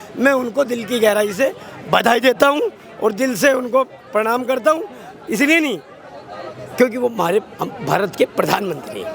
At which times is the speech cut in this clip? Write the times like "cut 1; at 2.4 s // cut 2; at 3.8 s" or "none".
none